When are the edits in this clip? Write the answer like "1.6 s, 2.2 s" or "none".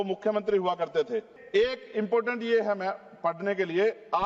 1.4 s